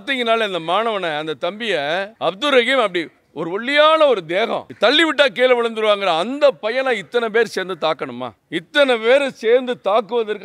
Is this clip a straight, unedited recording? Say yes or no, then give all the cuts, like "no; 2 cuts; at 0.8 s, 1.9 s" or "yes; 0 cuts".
no; 3 cuts; at 2.1 s, 4.7 s, 8.3 s